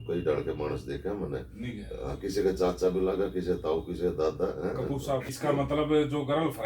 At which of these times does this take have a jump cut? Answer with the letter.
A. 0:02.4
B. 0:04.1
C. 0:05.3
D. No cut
C